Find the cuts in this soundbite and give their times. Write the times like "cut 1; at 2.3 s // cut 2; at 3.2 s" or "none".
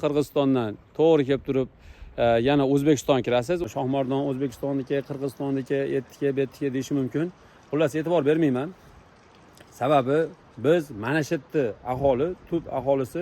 cut 1; at 3.7 s